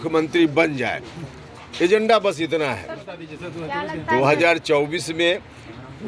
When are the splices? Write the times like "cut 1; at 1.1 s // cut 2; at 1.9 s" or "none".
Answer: cut 1; at 3.1 s